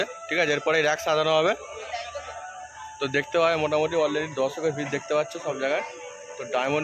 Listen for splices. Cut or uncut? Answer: uncut